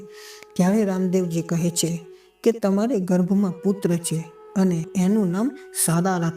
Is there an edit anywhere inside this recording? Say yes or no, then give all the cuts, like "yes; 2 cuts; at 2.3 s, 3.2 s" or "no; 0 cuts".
yes; 1 cut; at 4.9 s